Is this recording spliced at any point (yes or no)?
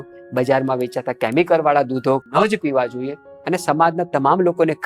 yes